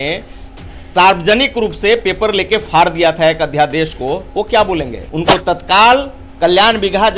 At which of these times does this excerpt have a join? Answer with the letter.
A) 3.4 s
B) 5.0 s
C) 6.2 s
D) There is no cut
B